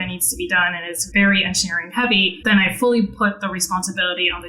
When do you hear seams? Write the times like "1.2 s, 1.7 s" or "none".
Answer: 0.9 s, 2.3 s